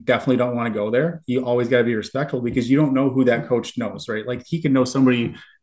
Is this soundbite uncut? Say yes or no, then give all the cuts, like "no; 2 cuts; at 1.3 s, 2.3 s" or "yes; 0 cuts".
yes; 0 cuts